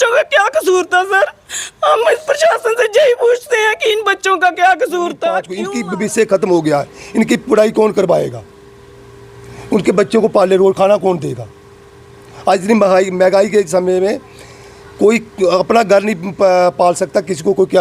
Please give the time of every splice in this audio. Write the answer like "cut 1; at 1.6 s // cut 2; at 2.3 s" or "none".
cut 1; at 5.6 s